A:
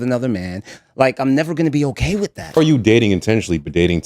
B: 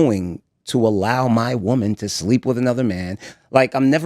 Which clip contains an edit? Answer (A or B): A